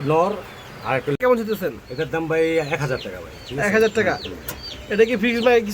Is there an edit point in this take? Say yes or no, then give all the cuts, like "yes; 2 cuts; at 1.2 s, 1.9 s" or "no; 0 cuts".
yes; 1 cut; at 1.1 s